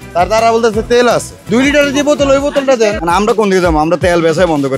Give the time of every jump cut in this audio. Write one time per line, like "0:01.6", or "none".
0:01.4
0:03.0